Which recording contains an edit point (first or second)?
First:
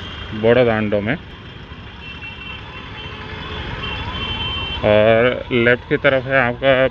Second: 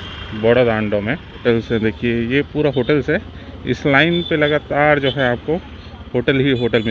second